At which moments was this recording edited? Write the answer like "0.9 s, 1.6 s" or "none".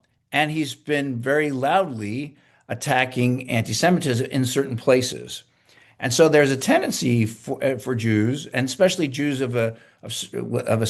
none